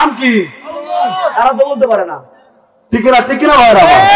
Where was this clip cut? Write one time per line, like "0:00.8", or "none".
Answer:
none